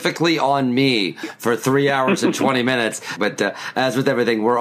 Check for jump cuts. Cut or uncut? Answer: cut